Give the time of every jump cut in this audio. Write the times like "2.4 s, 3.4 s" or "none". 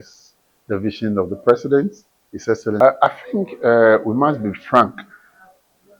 2.8 s